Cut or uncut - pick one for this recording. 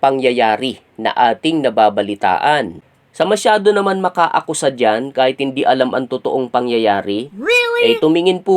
cut